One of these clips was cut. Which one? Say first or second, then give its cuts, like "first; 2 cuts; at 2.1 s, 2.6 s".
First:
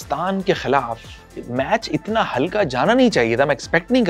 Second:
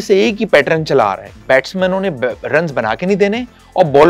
second; 1 cut; at 1.3 s